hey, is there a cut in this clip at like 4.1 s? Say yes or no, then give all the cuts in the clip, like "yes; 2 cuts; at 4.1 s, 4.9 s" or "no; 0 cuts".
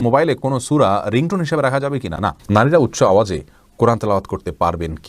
no; 1 cut; at 2.4 s